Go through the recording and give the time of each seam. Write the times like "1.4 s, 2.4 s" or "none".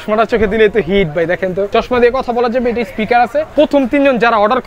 1.7 s, 3.5 s